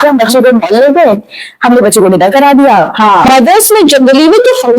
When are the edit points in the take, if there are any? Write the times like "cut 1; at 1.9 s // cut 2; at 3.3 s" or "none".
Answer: cut 1; at 3.3 s